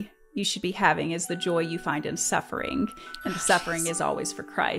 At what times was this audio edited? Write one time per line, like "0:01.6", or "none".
none